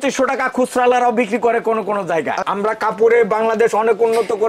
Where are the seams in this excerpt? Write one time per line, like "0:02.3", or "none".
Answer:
0:02.4